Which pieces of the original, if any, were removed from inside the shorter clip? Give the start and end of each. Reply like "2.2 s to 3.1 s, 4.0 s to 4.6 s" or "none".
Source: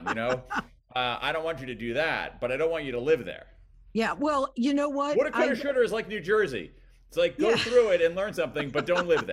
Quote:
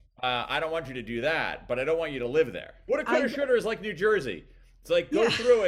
3.6 s to 5.1 s